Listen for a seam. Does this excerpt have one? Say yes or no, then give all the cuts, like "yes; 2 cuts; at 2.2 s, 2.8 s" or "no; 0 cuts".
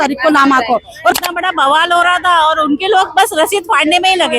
yes; 1 cut; at 1.1 s